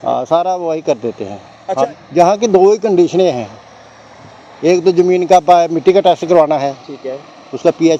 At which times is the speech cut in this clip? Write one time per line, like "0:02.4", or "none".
0:02.0